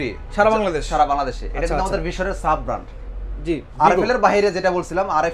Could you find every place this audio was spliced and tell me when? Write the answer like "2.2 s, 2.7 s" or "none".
none

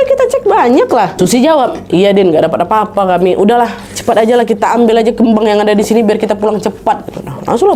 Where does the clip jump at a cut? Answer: none

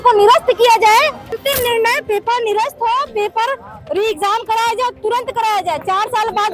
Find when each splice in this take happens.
1.2 s

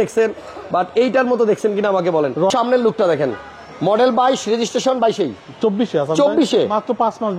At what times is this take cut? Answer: 2.5 s

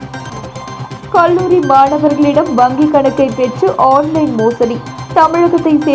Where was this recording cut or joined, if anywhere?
none

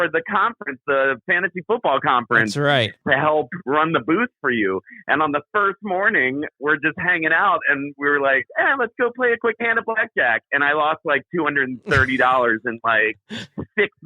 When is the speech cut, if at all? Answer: 2.9 s, 6.5 s

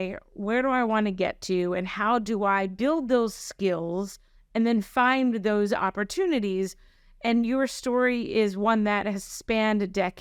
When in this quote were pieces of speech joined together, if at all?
none

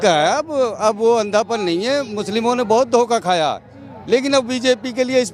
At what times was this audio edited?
none

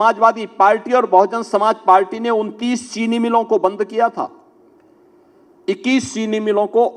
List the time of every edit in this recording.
none

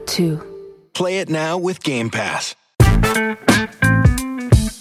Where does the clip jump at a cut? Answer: 2.6 s

